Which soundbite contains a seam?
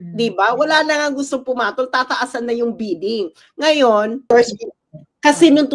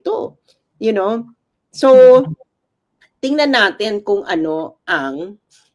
first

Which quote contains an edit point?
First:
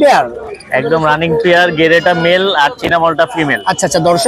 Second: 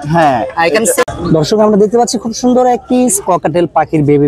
second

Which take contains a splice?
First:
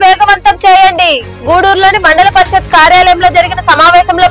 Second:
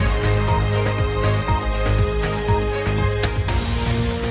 second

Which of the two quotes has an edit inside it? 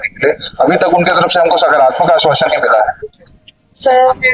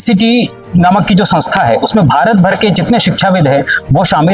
first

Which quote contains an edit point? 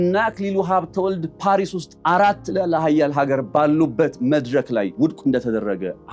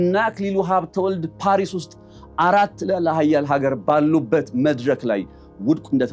first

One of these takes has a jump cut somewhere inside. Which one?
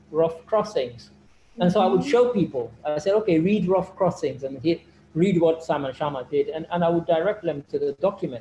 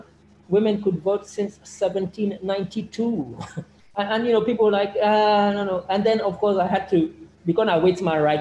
second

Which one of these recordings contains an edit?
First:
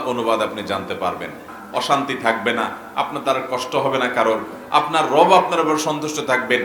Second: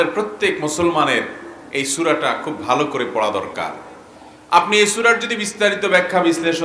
first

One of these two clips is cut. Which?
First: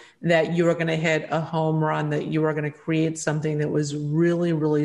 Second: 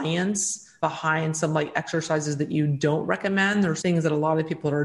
second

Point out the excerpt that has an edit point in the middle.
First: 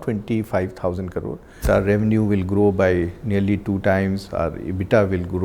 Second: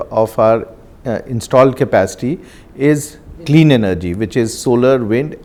first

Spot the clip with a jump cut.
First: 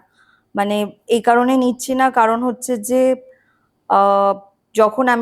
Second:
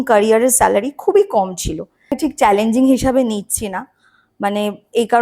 second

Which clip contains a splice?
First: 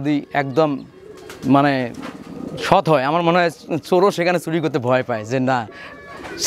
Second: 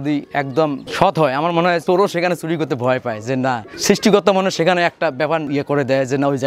second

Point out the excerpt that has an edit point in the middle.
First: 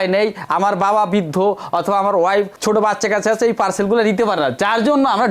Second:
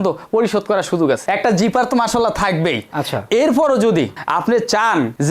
second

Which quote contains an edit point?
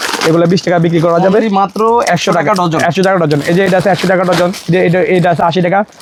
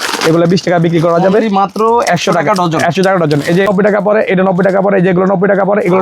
second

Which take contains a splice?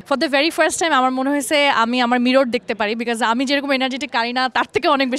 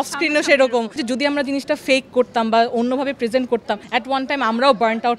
second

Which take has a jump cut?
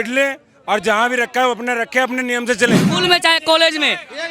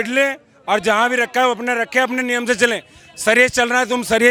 first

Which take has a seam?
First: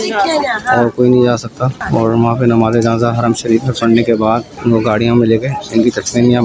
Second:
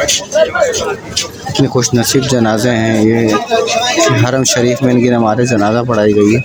first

